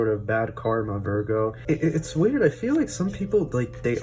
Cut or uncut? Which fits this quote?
cut